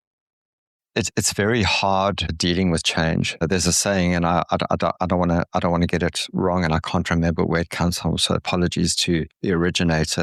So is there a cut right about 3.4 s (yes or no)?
yes